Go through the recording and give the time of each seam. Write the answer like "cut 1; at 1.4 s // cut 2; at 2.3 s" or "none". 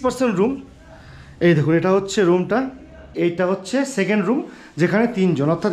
cut 1; at 3.1 s